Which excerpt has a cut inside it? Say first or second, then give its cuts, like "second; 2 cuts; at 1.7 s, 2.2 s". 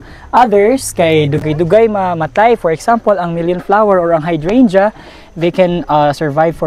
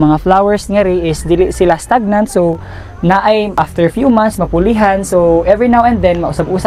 second; 1 cut; at 3.6 s